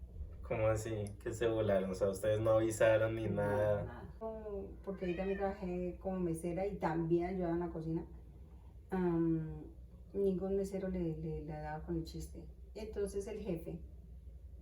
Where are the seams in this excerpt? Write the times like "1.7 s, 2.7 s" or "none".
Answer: 4.2 s